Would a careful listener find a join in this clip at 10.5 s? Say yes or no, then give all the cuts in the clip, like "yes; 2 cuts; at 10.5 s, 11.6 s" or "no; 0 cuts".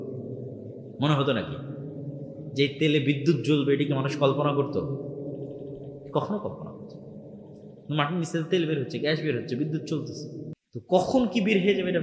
yes; 1 cut; at 10.5 s